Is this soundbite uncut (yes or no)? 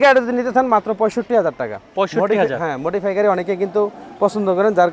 yes